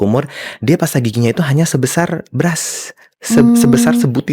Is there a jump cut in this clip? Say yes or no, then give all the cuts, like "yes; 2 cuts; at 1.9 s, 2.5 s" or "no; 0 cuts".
no; 0 cuts